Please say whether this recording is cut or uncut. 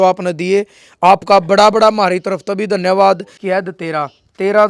cut